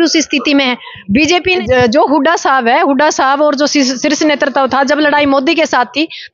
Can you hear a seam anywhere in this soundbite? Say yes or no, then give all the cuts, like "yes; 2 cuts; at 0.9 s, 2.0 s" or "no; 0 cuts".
yes; 1 cut; at 1.6 s